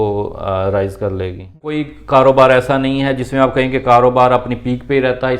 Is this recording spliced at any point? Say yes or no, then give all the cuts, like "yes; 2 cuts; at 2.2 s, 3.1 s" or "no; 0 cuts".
yes; 1 cut; at 1.9 s